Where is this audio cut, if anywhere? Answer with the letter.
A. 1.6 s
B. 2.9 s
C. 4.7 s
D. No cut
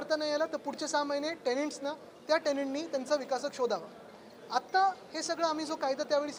D